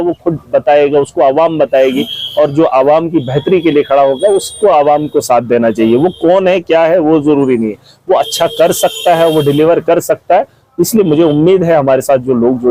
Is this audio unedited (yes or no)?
yes